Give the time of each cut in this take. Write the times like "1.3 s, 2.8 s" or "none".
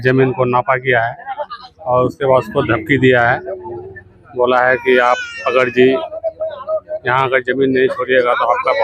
none